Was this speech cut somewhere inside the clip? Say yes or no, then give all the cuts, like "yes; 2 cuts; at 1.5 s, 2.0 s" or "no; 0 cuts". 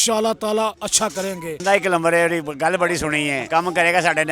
yes; 2 cuts; at 1.6 s, 3.4 s